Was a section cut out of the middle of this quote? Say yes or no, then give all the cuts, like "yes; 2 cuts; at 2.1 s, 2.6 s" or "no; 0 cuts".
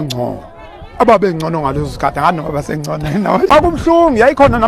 yes; 1 cut; at 3.5 s